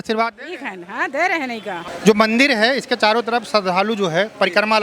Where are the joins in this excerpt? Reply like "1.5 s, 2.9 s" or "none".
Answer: none

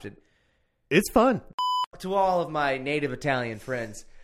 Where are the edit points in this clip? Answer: 1.4 s

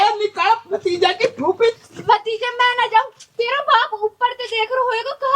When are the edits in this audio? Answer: 1.8 s

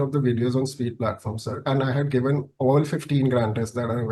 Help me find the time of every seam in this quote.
none

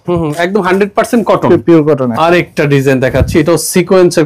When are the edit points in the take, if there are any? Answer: 2.1 s

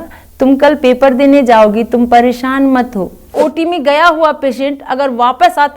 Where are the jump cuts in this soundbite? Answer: 3.3 s

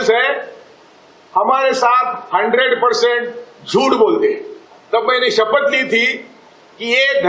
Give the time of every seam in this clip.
4.7 s

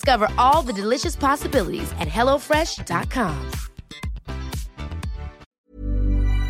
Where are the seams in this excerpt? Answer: 5.6 s

